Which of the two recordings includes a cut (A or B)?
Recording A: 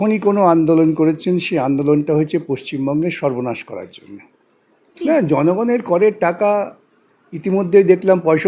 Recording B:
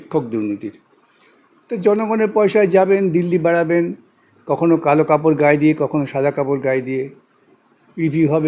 A